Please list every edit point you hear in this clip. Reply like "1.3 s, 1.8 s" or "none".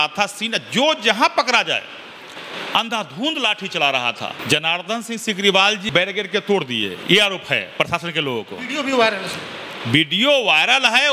4.4 s, 5.8 s